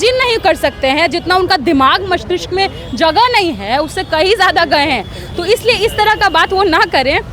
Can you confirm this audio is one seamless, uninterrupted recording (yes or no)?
yes